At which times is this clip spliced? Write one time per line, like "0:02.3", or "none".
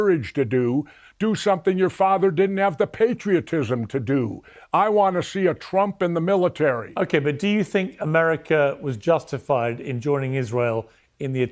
0:06.9